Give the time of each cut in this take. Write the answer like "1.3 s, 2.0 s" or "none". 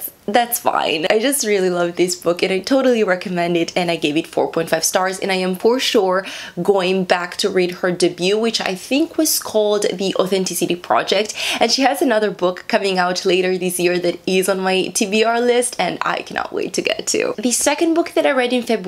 none